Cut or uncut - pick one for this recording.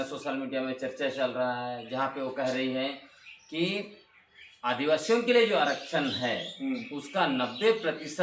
uncut